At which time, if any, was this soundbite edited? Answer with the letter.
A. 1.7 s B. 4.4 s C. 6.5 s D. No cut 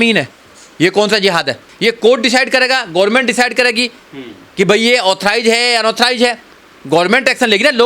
A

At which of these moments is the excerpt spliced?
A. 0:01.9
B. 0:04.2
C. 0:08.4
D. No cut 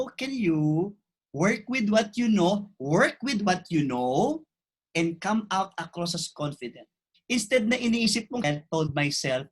C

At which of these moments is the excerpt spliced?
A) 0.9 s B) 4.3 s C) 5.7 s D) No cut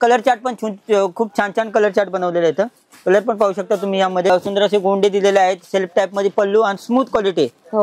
B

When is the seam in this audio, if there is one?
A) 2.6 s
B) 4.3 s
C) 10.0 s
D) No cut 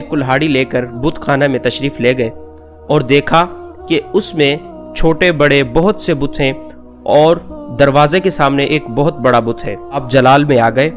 C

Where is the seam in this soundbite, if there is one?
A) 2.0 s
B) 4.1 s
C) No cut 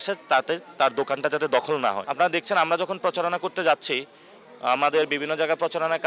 A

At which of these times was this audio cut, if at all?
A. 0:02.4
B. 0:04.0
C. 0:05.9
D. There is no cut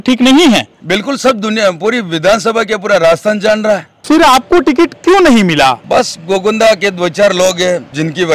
B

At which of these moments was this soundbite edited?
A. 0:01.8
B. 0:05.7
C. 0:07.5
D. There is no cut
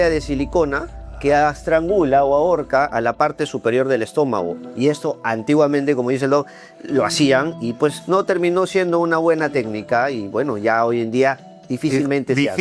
D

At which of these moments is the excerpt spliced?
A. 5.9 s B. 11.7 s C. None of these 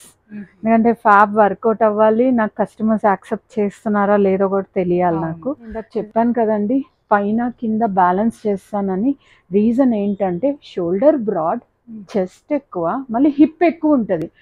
A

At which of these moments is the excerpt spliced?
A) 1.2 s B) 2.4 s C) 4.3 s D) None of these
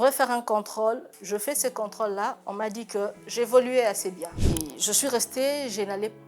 C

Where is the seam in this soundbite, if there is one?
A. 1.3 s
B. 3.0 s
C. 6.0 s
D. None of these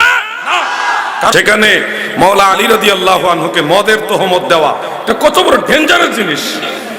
A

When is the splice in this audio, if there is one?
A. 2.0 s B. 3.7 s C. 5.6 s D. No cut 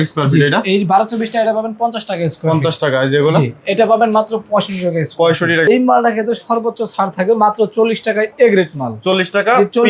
C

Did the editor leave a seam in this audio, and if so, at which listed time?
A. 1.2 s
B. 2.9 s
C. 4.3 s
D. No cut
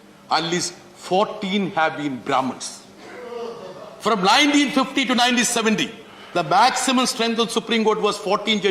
D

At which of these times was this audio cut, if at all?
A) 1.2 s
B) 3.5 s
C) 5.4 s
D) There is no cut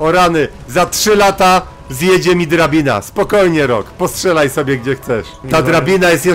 C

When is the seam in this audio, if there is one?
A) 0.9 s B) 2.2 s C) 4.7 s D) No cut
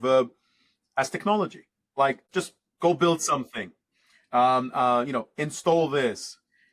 B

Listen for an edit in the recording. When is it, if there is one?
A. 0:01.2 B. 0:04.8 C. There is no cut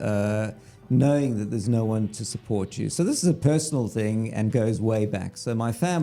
C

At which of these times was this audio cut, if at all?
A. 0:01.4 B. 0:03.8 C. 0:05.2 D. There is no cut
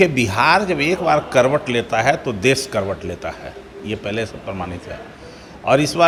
D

